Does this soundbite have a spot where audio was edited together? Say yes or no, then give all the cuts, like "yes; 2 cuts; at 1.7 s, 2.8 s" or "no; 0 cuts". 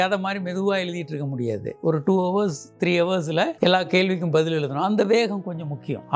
no; 0 cuts